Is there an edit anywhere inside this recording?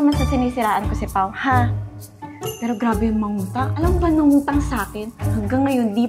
no; 0 cuts

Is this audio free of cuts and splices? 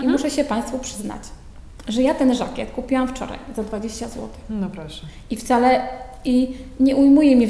yes; 0 cuts

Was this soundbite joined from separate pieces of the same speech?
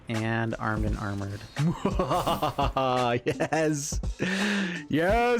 no; 0 cuts

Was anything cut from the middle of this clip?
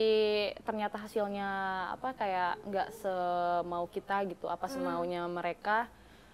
no; 0 cuts

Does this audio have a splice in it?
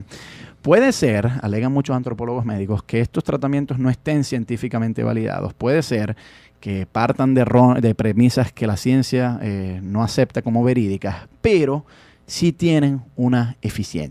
yes; 1 cut; at 5.2 s

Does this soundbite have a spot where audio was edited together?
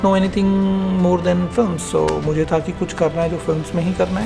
no; 0 cuts

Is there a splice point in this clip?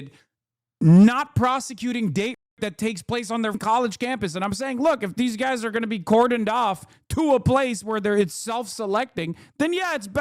yes; 1 cut; at 3.6 s

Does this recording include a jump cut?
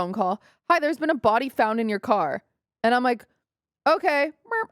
no; 0 cuts

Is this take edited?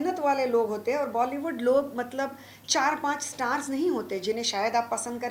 no; 0 cuts

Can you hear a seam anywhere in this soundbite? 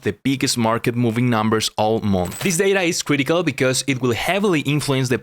yes; 1 cut; at 2.3 s

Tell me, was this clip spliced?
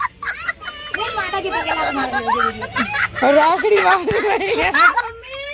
no; 0 cuts

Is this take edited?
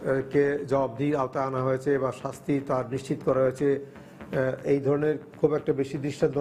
no; 0 cuts

